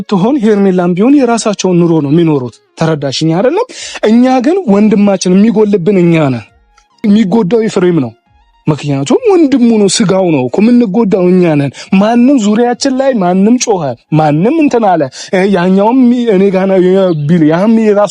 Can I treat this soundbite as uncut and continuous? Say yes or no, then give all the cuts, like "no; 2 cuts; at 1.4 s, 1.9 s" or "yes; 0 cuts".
no; 1 cut; at 7.0 s